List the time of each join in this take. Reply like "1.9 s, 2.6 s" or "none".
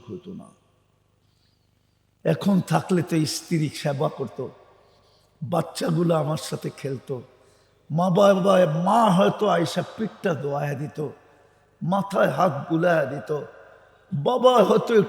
1.4 s